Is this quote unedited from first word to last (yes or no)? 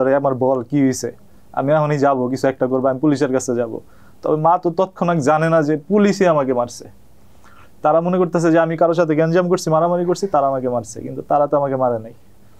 yes